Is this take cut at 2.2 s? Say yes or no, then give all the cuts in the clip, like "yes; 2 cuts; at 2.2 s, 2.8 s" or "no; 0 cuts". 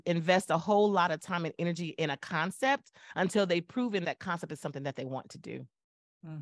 no; 1 cut; at 4.0 s